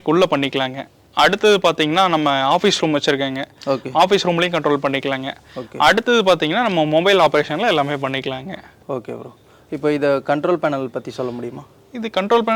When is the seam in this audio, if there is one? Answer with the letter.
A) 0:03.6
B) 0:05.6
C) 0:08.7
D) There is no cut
D